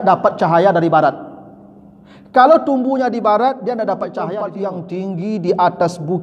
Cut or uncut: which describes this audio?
cut